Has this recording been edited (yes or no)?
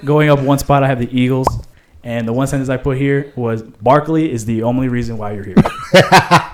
no